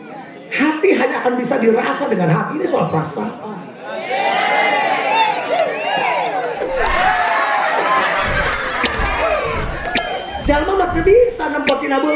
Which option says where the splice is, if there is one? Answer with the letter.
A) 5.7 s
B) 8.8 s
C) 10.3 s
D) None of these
C